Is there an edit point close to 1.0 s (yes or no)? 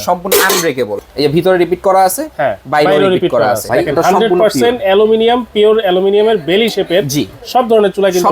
yes